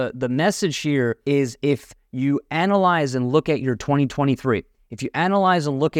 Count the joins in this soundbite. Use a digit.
1